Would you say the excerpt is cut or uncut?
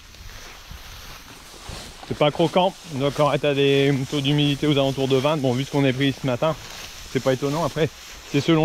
uncut